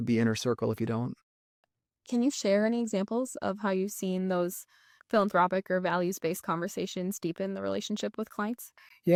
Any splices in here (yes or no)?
no